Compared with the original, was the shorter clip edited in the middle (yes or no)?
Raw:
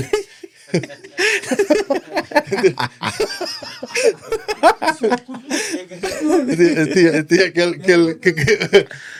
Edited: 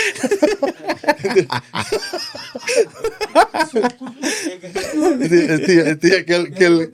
no